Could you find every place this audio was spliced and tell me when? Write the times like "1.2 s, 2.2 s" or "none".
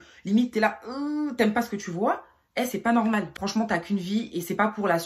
3.3 s